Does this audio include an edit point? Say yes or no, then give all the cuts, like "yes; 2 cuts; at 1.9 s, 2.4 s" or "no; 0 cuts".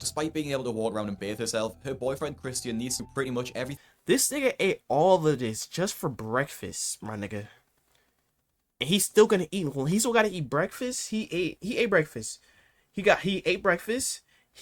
yes; 1 cut; at 3.8 s